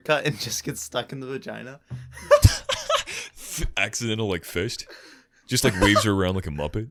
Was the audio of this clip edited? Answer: no; 0 cuts

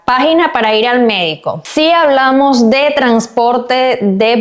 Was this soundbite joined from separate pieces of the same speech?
yes; 1 cut; at 1.6 s

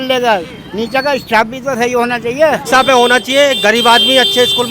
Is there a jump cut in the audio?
yes; 1 cut; at 2.6 s

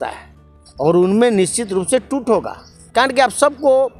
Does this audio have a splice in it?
no; 0 cuts

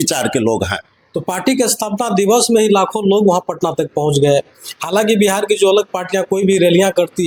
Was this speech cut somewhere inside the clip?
no; 0 cuts

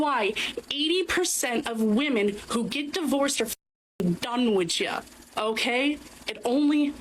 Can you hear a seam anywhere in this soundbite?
yes; 1 cut; at 5.5 s

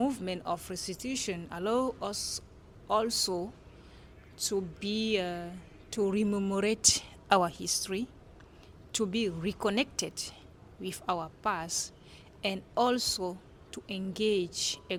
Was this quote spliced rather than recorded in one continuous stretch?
no; 0 cuts

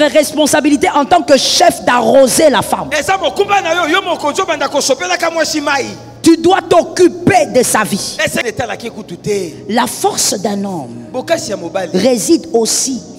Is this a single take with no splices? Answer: no; 1 cut; at 8.4 s

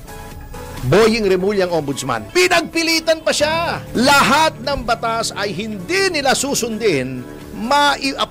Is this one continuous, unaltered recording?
no; 2 cuts; at 2.2 s, 3.8 s

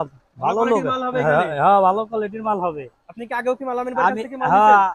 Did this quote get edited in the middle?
no; 0 cuts

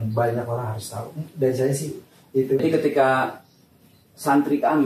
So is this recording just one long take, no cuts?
no; 1 cut; at 2.6 s

